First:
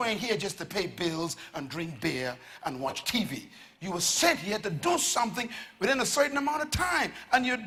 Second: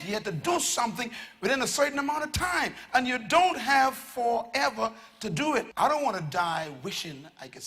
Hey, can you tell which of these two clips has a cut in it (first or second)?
second